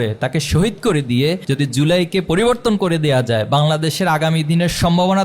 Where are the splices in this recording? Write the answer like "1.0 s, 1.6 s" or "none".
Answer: 1.4 s